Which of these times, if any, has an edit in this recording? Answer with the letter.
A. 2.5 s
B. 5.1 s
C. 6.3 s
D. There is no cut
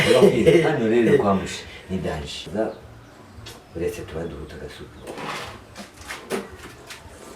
A